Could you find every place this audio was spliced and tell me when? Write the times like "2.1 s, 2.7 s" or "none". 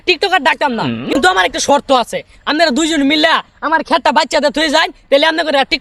none

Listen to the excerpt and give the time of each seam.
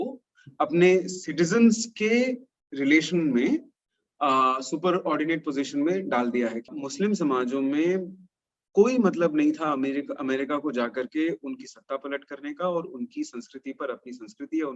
6.7 s

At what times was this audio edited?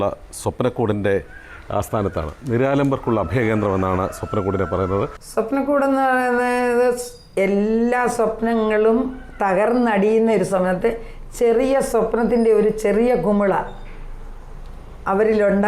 5.2 s

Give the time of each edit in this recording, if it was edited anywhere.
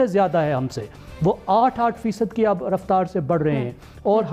none

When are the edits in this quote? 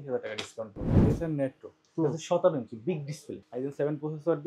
1.0 s, 3.4 s

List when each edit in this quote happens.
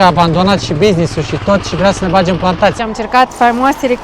2.8 s

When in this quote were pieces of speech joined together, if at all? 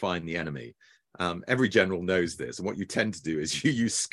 none

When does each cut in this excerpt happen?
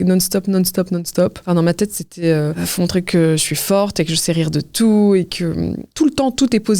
1.4 s, 2.6 s, 5.8 s

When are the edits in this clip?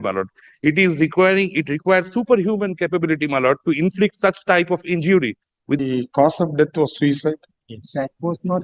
5.8 s

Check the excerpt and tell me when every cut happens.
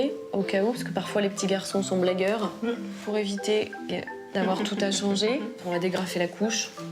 1.1 s

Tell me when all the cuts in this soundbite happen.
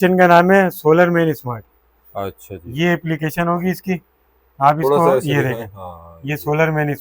none

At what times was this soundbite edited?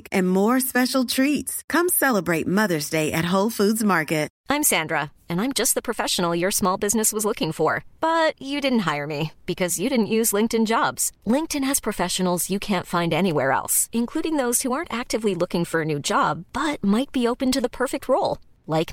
4.3 s

